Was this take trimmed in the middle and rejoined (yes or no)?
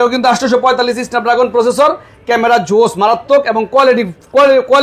no